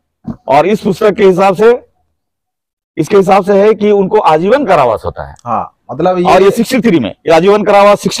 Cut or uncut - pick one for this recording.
uncut